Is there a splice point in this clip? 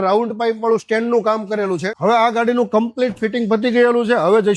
yes; 1 cut; at 1.9 s

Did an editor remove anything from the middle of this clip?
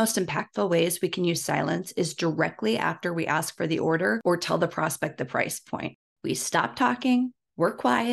yes; 2 cuts; at 4.2 s, 6.1 s

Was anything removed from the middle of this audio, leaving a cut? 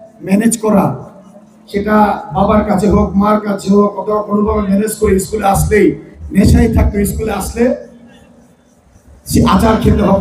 yes; 1 cut; at 6.1 s

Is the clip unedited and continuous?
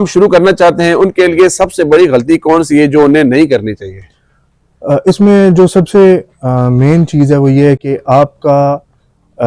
yes; 0 cuts

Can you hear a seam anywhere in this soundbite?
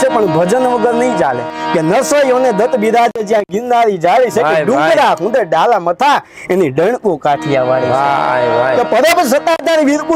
yes; 1 cut; at 1.5 s

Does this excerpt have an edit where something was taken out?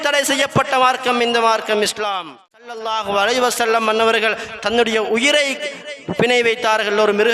yes; 1 cut; at 2.7 s

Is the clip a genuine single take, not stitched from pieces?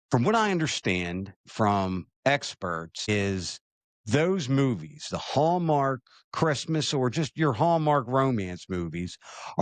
no; 1 cut; at 3.1 s

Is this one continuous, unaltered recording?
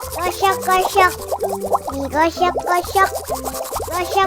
no; 1 cut; at 3.3 s

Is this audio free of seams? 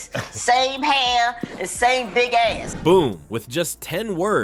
yes; 0 cuts

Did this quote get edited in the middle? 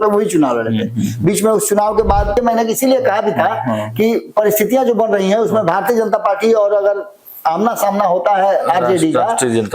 yes; 1 cut; at 2.4 s

